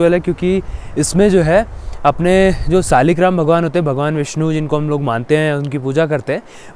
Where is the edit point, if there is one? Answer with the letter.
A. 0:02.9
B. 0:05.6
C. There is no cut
C